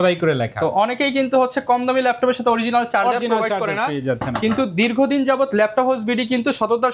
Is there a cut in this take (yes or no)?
no